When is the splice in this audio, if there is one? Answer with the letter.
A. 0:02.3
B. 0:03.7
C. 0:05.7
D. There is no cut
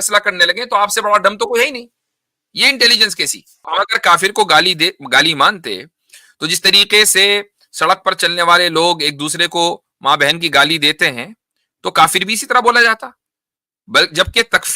B